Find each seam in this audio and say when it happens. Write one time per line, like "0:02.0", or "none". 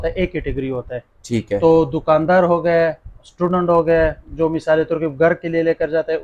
none

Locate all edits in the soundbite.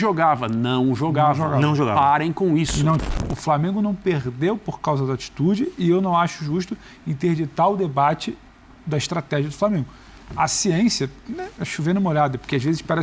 0:03.0

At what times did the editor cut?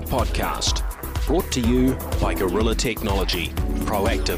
none

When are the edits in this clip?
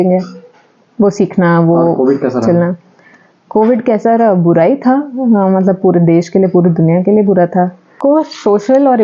0:07.9

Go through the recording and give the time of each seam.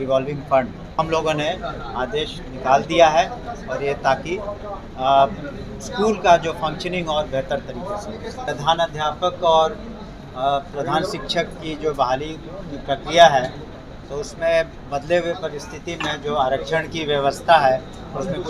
0:00.9
0:08.4

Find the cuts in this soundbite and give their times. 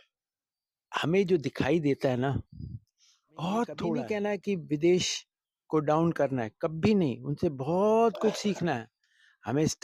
0:04.0

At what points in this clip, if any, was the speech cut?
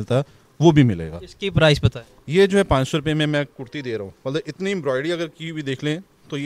none

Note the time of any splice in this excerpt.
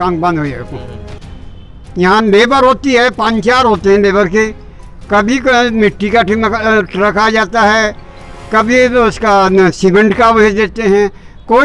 none

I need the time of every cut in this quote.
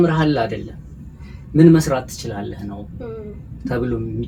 none

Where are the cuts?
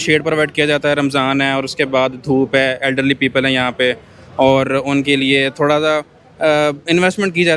none

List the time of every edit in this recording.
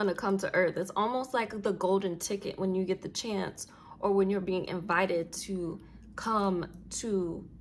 none

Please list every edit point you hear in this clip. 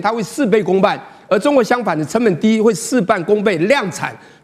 none

